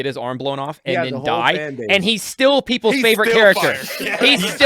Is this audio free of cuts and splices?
yes; 0 cuts

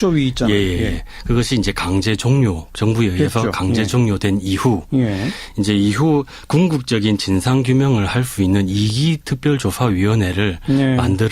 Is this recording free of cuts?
no; 1 cut; at 5.3 s

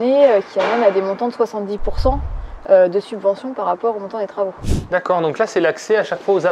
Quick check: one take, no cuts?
no; 1 cut; at 4.7 s

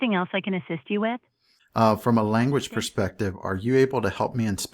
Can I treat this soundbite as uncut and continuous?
no; 1 cut; at 1.0 s

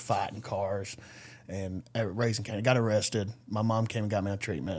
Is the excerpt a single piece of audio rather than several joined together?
yes; 0 cuts

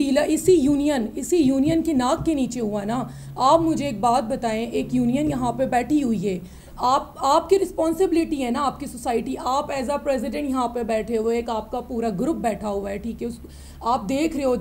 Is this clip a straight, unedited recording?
yes; 0 cuts

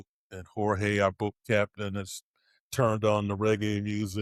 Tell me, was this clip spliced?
no; 0 cuts

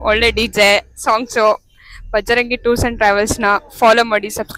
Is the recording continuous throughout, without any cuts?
yes; 0 cuts

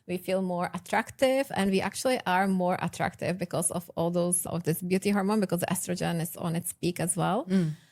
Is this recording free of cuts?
yes; 0 cuts

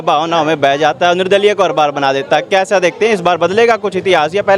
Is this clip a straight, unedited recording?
yes; 0 cuts

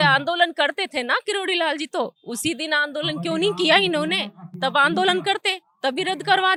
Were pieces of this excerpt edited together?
no; 0 cuts

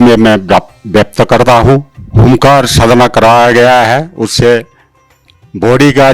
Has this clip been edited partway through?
yes; 1 cut; at 2.0 s

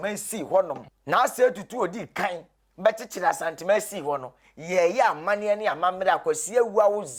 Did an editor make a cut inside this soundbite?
no; 0 cuts

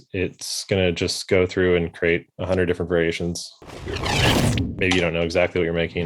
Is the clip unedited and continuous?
no; 1 cut; at 3.6 s

